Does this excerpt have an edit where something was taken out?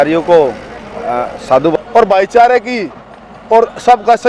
yes; 1 cut; at 1.7 s

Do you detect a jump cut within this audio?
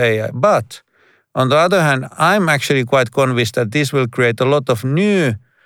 no; 0 cuts

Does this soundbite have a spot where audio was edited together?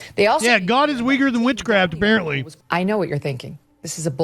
yes; 1 cut; at 2.5 s

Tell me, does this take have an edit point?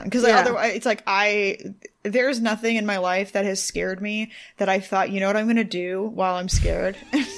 no; 0 cuts

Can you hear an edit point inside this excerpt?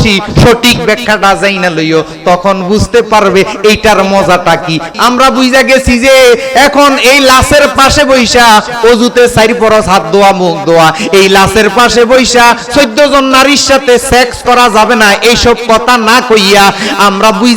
yes; 1 cut; at 4.9 s

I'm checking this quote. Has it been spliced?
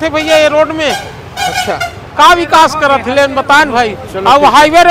no; 0 cuts

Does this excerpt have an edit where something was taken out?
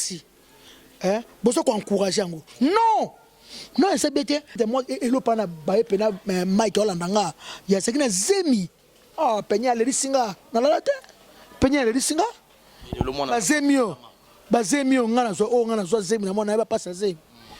yes; 1 cut; at 4.6 s

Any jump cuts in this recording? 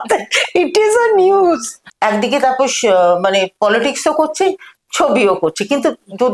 yes; 1 cut; at 1.7 s

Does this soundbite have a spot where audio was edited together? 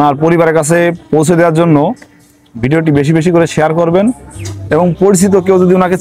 no; 0 cuts

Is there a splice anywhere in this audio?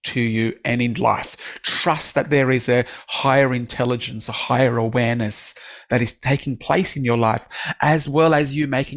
no; 0 cuts

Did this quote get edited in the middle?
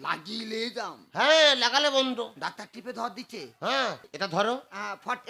yes; 1 cut; at 4.0 s

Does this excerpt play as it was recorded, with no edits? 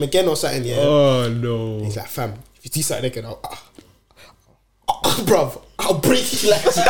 yes; 0 cuts

